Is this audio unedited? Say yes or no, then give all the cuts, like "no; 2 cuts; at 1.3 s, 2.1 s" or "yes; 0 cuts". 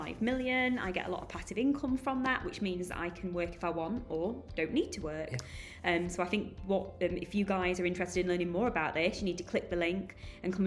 yes; 0 cuts